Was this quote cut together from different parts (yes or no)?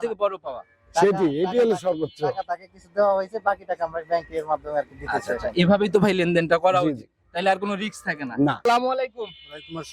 yes